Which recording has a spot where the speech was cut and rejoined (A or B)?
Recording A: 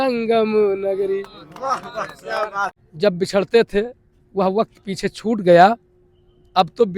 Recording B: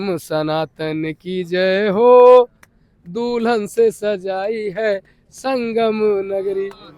A